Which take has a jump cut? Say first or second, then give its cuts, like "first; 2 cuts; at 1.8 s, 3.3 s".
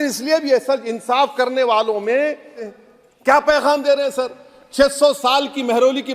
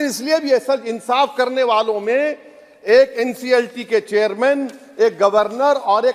first; 1 cut; at 2.7 s